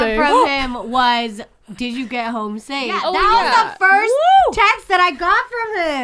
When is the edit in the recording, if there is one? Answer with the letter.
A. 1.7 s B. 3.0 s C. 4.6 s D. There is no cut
B